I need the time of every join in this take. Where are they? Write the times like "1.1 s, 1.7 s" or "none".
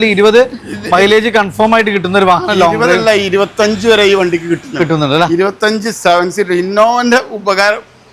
none